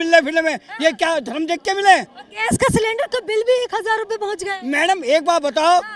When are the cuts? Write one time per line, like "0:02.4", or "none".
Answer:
none